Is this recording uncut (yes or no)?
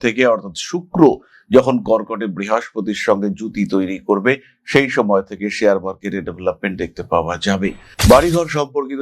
no